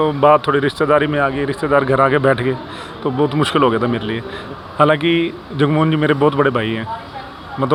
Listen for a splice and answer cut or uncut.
uncut